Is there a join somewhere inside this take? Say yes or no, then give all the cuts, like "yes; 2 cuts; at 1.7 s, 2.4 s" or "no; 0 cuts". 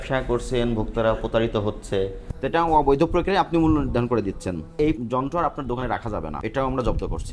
yes; 3 cuts; at 2.2 s, 4.9 s, 6.4 s